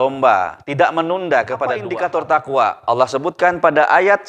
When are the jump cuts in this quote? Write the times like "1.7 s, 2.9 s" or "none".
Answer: 1.9 s